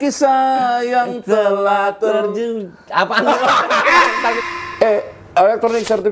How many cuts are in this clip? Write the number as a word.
one